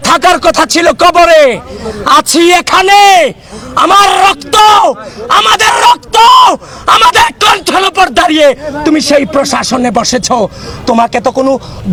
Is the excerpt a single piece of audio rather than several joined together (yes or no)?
yes